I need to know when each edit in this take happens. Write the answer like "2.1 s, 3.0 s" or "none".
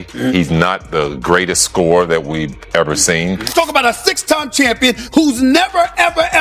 3.3 s